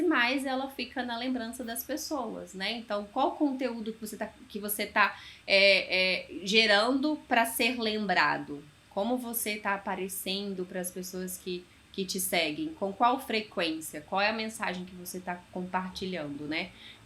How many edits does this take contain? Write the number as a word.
zero